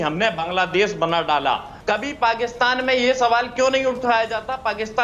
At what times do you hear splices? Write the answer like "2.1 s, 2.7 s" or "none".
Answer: 1.7 s